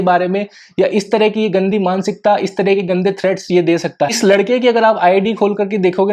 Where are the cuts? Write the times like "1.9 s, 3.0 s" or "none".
4.1 s

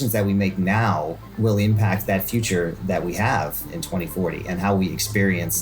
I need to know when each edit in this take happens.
none

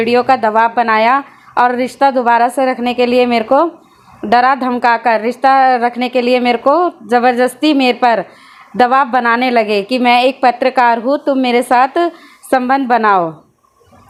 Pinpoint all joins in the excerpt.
none

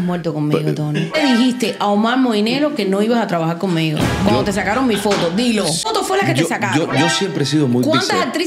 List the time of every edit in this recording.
1.2 s, 5.8 s

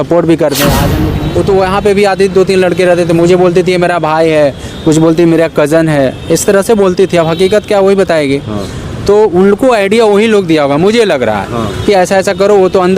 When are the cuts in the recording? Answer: 1.0 s

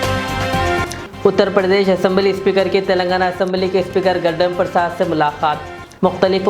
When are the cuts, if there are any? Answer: 1.0 s

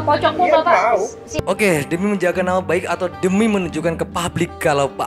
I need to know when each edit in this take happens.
1.2 s

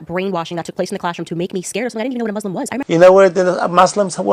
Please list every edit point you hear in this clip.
2.8 s

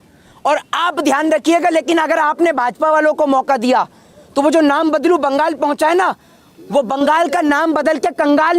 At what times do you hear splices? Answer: none

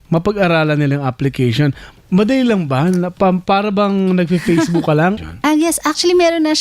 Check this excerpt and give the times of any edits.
5.2 s

